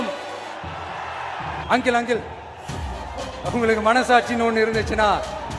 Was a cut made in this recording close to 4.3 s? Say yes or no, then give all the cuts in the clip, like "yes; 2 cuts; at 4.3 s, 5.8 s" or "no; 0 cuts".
no; 1 cut; at 1.6 s